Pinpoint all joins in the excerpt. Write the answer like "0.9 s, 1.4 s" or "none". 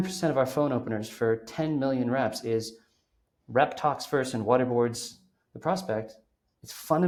none